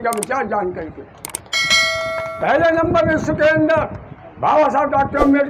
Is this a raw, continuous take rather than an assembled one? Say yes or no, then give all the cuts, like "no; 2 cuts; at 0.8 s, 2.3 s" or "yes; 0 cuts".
yes; 0 cuts